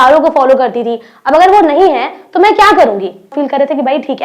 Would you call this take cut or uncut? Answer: cut